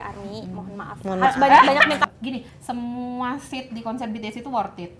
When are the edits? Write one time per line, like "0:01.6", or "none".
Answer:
0:02.0